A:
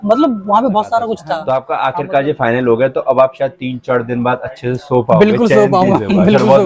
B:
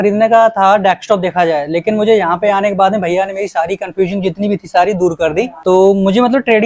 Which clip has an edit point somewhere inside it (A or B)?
A